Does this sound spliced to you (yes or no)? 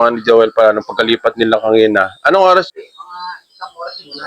yes